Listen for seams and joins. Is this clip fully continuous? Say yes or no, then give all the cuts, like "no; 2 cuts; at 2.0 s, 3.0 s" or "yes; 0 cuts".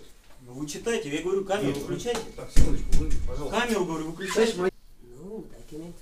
no; 1 cut; at 4.7 s